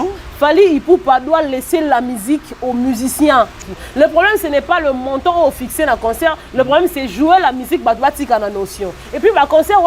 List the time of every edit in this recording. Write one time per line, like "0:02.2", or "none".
0:03.6